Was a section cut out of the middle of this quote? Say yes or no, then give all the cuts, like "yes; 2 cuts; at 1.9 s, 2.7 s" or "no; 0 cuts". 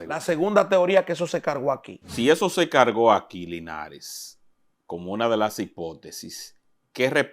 yes; 1 cut; at 2.1 s